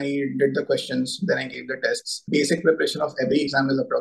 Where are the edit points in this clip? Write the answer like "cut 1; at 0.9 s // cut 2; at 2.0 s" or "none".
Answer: cut 1; at 2.2 s